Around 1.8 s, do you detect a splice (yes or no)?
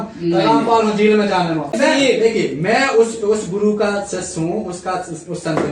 yes